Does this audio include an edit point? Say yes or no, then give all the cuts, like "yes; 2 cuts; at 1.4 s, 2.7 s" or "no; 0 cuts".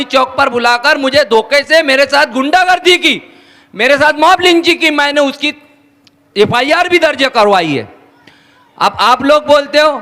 no; 0 cuts